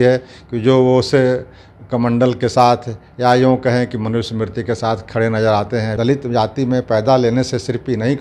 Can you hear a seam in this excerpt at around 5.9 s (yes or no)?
yes